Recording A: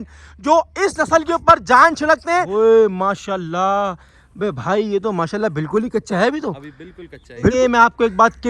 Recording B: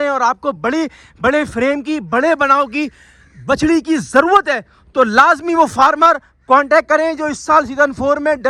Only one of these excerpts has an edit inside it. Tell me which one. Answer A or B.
A